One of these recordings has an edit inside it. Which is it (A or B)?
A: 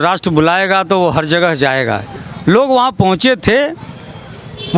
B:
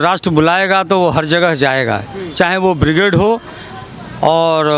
A